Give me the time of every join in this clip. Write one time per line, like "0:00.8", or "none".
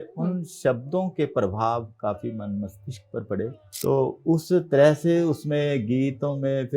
0:03.6

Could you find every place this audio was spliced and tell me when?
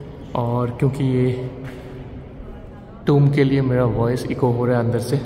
none

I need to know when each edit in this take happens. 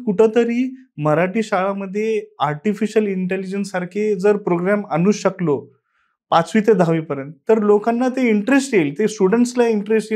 none

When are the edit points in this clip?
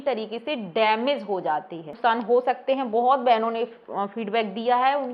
0:01.9

